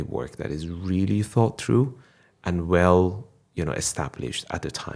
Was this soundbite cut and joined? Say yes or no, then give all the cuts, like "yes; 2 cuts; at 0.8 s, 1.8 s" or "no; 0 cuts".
no; 0 cuts